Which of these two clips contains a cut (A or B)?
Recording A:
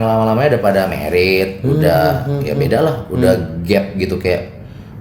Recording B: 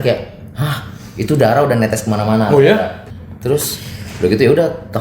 B